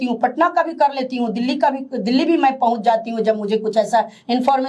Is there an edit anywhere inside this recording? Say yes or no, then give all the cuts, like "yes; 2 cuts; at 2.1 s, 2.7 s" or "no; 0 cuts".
no; 0 cuts